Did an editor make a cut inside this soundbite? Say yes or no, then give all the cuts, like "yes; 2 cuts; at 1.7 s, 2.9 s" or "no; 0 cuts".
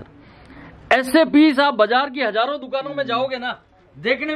no; 0 cuts